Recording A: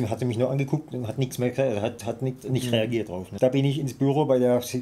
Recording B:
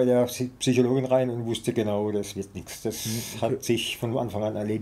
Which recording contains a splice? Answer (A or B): A